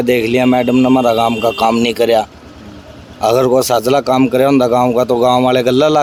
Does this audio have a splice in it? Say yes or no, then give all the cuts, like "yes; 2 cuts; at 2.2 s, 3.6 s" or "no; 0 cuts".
no; 0 cuts